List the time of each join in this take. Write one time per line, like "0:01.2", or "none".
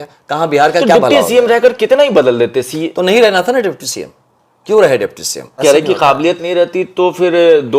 0:05.4